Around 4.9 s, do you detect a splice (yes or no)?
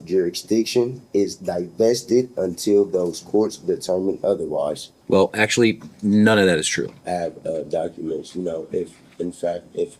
yes